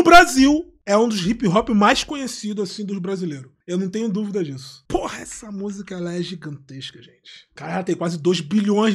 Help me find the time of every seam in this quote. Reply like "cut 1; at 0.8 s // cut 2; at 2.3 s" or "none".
cut 1; at 7.6 s